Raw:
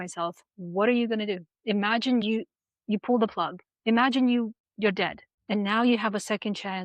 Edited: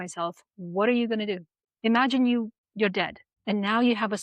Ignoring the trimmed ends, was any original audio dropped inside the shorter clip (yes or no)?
yes